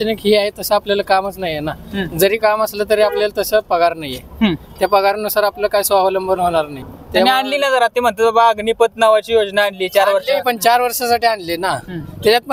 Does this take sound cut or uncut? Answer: cut